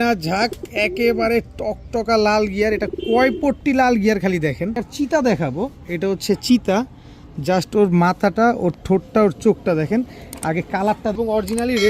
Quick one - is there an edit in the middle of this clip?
yes; 2 cuts; at 4.8 s, 11.2 s

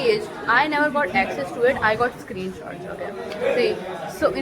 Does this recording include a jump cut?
no; 0 cuts

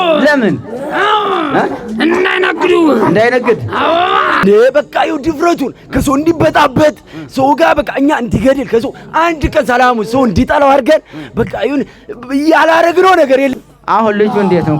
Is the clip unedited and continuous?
no; 2 cuts; at 4.4 s, 13.5 s

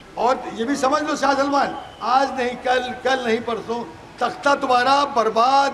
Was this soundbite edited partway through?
no; 0 cuts

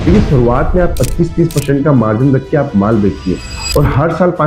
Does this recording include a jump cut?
no; 0 cuts

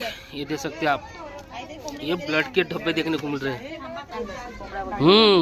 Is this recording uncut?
no; 1 cut; at 4.1 s

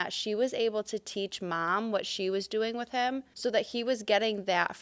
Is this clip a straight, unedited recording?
no; 1 cut; at 3.3 s

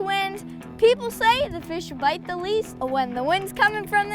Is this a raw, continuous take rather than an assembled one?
no; 1 cut; at 2.7 s

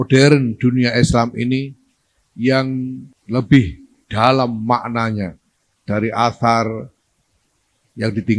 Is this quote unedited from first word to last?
no; 1 cut; at 3.1 s

